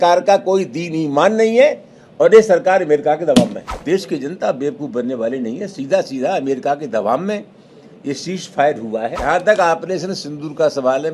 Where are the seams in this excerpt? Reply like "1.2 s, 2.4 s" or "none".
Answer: 3.7 s, 9.2 s